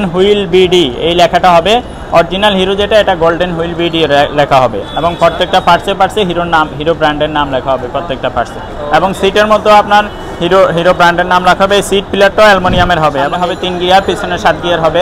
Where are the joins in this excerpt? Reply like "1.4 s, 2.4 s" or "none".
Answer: 13.3 s